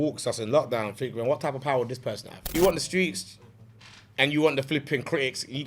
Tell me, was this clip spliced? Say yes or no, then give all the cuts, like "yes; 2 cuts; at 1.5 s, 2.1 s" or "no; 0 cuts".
yes; 1 cut; at 2.5 s